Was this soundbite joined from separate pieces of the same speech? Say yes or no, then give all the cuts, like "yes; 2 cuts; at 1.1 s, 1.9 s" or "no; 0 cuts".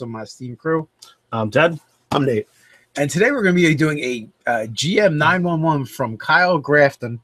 yes; 1 cut; at 3.6 s